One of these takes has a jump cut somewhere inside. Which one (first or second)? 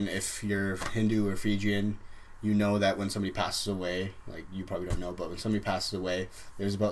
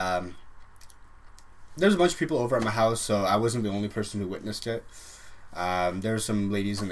first